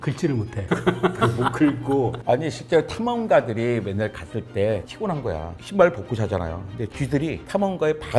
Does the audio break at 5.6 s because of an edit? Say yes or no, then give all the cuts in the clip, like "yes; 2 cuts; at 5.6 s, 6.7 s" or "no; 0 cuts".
yes; 2 cuts; at 2.2 s, 5.6 s